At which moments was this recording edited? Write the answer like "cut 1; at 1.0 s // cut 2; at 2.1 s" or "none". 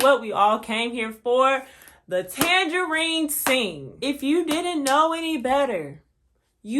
cut 1; at 3.9 s